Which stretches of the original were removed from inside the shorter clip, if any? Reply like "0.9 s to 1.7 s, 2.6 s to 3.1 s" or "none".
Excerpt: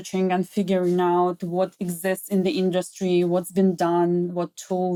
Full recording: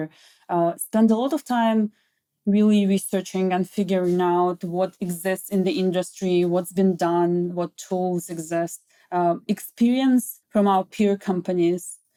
none